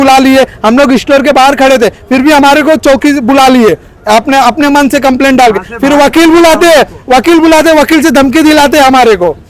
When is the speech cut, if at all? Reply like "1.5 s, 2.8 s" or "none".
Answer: none

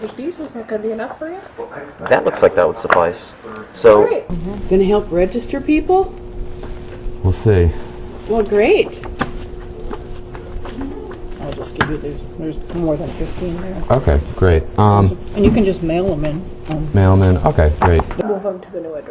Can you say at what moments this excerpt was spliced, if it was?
none

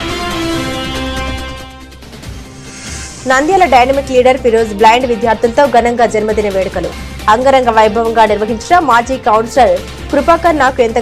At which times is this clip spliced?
none

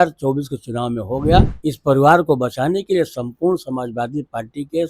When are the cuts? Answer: 1.5 s

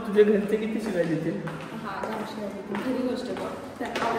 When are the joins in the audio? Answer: none

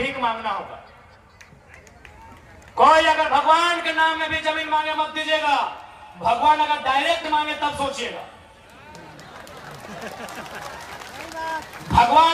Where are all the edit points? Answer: none

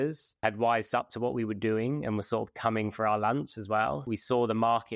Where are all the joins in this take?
4.0 s

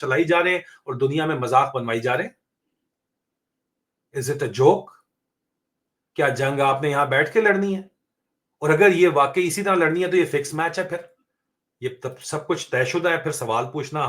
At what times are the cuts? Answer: none

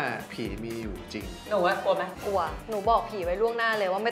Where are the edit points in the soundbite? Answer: 1.3 s

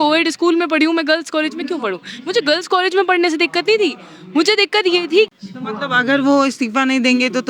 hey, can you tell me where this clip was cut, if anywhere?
5.3 s

